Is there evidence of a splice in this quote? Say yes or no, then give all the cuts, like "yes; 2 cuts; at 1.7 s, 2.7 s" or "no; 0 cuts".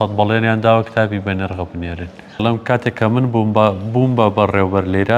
yes; 1 cut; at 2.4 s